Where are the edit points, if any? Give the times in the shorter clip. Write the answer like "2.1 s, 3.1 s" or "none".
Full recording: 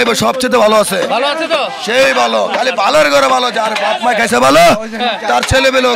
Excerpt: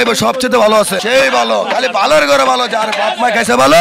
1.0 s